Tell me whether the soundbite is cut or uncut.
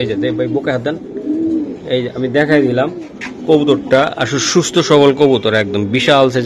uncut